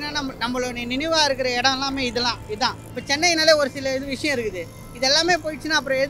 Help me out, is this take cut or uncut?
cut